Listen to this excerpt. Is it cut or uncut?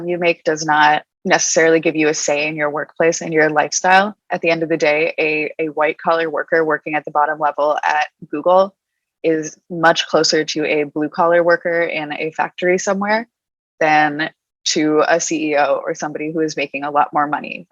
cut